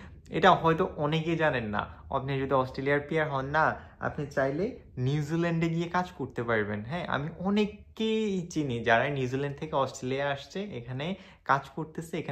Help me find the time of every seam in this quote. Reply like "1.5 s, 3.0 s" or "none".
none